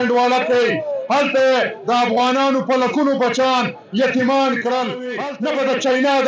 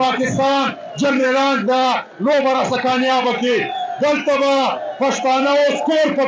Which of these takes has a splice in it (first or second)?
first